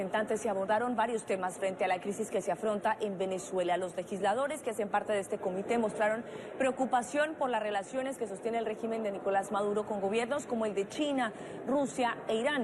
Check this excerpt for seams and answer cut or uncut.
uncut